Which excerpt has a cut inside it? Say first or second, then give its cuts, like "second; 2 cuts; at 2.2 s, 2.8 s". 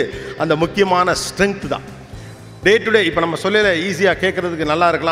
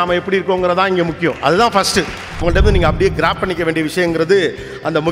second; 1 cut; at 2.4 s